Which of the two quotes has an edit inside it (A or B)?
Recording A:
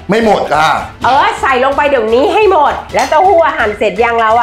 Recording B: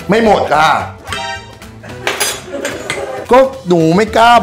A